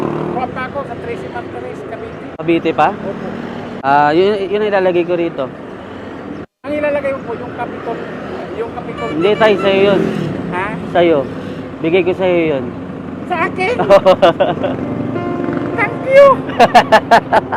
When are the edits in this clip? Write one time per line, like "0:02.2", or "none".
0:02.3
0:03.7